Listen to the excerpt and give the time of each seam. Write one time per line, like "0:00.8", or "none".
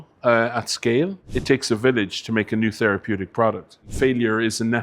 0:01.3
0:03.8